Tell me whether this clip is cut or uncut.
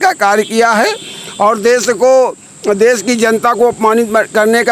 uncut